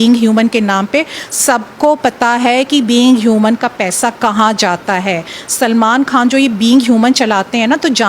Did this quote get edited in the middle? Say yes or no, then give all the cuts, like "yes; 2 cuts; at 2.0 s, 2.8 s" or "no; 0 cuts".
no; 0 cuts